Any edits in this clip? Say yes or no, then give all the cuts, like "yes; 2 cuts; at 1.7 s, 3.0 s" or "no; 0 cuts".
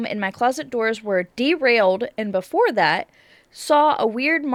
no; 0 cuts